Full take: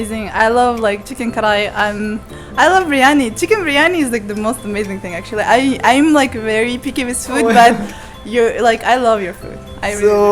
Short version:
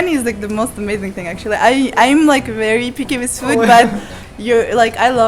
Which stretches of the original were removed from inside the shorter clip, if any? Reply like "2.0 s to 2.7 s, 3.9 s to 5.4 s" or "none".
none